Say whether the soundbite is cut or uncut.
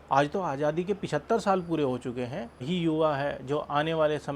cut